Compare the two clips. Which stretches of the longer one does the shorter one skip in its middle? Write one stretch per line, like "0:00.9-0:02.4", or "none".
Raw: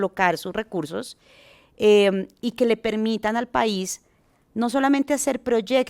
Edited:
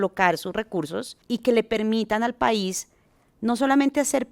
0:01.2-0:02.4